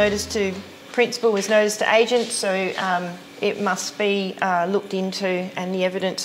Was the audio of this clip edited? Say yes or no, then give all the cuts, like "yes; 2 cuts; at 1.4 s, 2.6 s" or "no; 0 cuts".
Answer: yes; 1 cut; at 3.2 s